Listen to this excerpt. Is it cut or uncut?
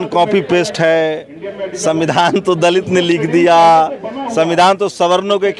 uncut